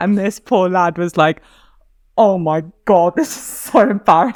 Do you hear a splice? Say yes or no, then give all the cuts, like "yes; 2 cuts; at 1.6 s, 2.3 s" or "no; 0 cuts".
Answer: no; 0 cuts